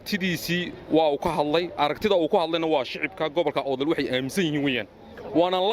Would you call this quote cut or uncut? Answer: uncut